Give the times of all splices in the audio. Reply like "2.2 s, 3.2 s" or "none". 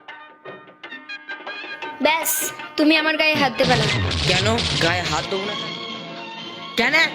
0.9 s, 5.5 s